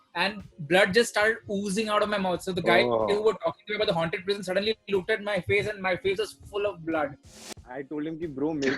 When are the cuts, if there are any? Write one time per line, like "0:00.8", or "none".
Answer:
0:07.4